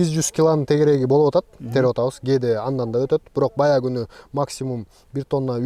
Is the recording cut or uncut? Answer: uncut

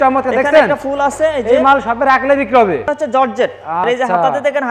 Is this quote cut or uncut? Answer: cut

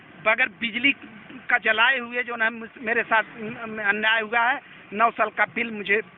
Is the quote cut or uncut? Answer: uncut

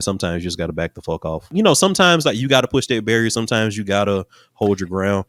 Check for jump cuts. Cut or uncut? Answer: uncut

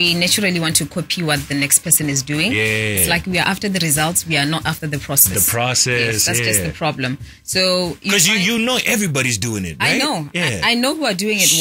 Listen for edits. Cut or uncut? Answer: uncut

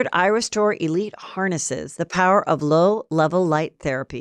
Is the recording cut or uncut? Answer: uncut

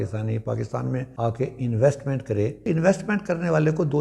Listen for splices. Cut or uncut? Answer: cut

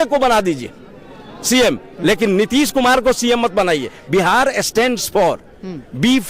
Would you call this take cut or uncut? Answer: cut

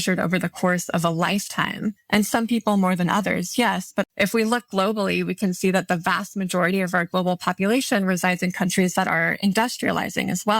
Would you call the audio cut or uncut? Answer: cut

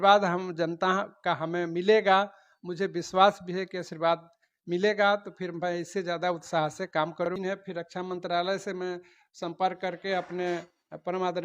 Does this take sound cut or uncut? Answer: cut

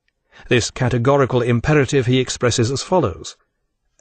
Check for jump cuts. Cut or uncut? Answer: uncut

